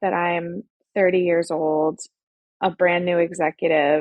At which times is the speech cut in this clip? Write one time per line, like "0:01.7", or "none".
none